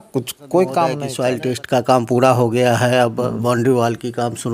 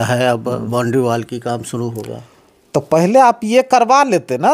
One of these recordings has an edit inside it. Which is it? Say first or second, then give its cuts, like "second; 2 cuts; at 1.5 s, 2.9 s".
first; 1 cut; at 1.1 s